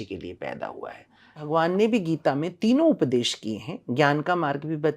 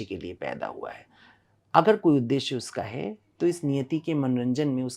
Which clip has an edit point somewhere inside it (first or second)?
first